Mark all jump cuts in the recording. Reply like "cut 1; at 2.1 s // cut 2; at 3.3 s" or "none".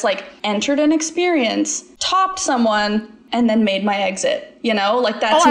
none